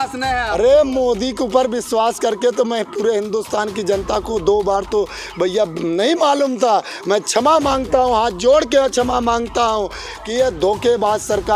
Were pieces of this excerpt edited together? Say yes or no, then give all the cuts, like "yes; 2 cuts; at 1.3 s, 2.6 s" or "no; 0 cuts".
no; 0 cuts